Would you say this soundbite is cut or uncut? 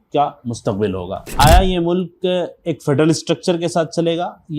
cut